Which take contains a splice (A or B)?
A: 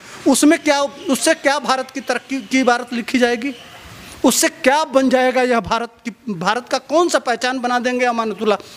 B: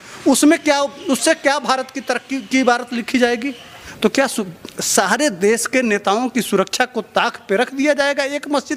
B